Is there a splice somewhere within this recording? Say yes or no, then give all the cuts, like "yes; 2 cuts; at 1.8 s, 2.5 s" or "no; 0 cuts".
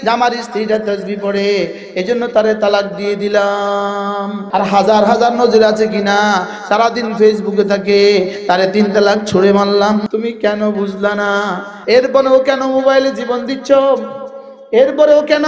yes; 3 cuts; at 4.4 s, 10.0 s, 11.7 s